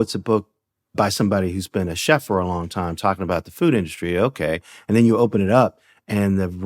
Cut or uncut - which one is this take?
cut